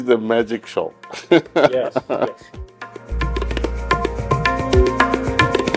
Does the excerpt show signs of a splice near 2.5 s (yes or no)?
yes